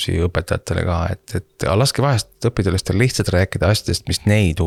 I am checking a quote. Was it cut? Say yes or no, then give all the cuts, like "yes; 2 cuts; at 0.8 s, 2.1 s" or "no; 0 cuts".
no; 0 cuts